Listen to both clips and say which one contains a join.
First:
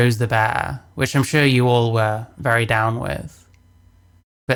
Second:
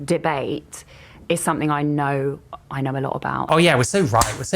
second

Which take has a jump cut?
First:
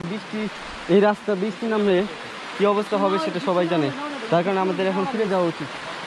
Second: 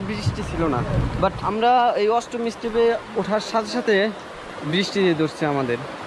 second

